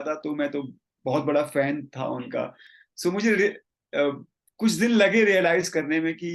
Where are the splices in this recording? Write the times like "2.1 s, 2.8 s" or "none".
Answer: none